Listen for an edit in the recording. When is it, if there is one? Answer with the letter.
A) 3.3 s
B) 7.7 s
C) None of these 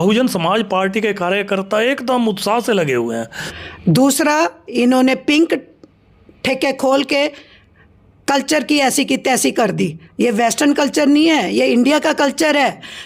A